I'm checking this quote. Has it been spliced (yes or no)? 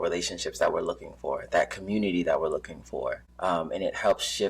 yes